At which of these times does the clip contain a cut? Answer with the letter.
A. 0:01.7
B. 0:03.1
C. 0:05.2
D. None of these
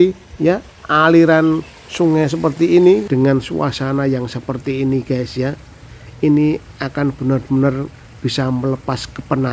B